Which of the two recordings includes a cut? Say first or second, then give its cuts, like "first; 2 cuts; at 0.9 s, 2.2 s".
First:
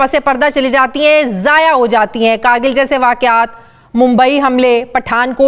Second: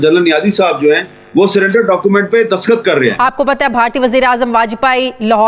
second; 1 cut; at 3.2 s